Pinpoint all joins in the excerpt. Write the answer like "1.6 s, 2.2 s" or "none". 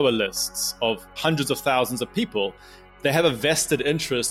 1.2 s, 2.8 s